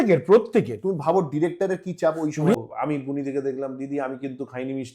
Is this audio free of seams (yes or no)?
no